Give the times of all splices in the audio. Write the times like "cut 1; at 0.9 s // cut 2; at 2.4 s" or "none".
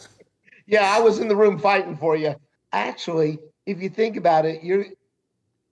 cut 1; at 2.5 s